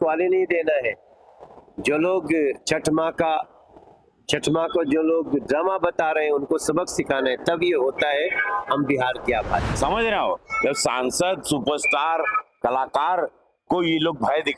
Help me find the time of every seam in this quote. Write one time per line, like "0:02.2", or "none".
0:09.7